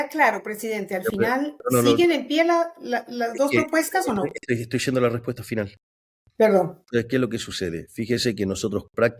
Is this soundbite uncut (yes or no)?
yes